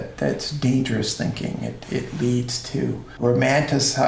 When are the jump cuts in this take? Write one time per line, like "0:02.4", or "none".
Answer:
0:03.2